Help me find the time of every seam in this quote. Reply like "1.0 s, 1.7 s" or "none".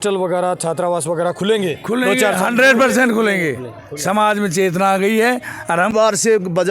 5.8 s